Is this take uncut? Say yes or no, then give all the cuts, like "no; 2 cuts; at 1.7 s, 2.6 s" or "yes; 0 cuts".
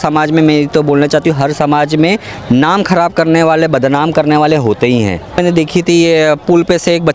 no; 1 cut; at 5.4 s